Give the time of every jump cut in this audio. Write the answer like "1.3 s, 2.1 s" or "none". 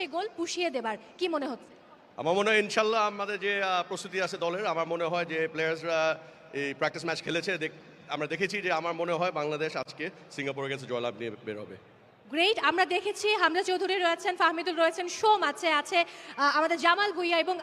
13.6 s